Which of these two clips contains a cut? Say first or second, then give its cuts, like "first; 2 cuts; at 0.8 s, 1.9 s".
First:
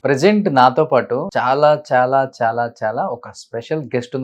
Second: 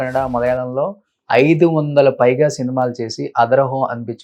first; 1 cut; at 1.2 s